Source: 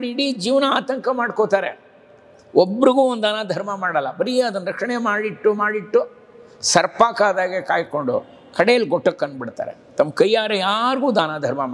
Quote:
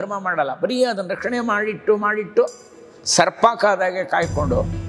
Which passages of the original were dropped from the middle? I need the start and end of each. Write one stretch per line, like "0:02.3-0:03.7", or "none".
none